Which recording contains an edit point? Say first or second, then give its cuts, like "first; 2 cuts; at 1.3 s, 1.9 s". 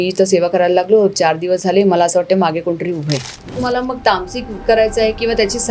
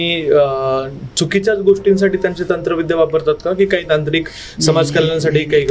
first; 1 cut; at 3.6 s